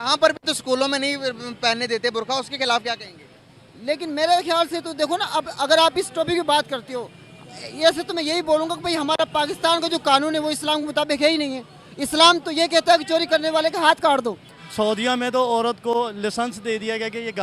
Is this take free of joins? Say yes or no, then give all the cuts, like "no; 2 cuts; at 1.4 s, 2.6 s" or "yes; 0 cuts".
no; 1 cut; at 14.6 s